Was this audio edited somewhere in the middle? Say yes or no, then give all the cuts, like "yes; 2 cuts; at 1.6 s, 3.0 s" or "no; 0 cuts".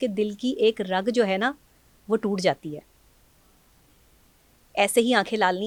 no; 0 cuts